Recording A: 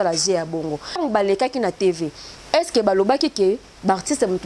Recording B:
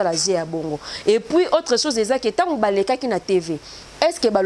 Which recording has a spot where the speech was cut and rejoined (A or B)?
A